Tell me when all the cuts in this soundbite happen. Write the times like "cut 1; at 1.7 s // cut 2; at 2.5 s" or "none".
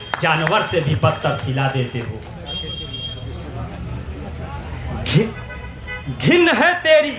none